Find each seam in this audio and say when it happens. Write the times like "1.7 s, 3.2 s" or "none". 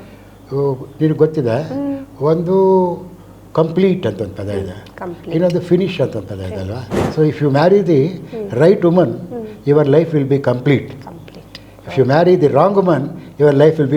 6.9 s